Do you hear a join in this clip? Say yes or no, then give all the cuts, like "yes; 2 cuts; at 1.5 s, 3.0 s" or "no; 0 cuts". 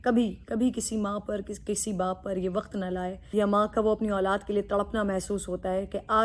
yes; 1 cut; at 3.2 s